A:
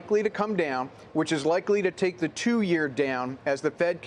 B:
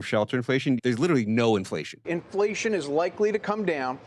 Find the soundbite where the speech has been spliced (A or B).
B